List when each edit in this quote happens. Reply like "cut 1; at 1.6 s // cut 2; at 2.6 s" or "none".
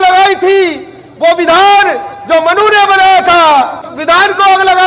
cut 1; at 3.9 s

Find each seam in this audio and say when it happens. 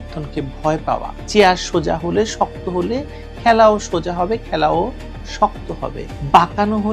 cut 1; at 1.2 s

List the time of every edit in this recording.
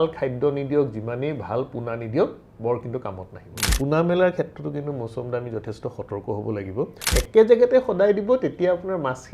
cut 1; at 3.6 s // cut 2; at 7.2 s

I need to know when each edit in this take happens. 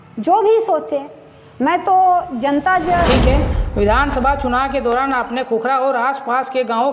cut 1; at 3.1 s

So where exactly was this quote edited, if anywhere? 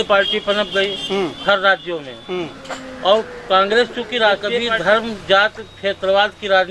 cut 1; at 4.7 s

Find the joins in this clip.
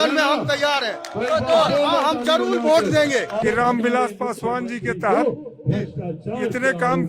cut 1; at 3.3 s

